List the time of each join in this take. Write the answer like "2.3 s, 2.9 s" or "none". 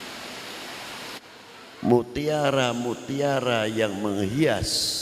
1.2 s